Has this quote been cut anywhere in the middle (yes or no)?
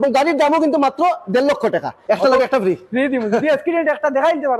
yes